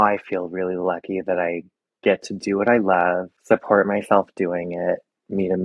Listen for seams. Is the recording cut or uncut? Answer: cut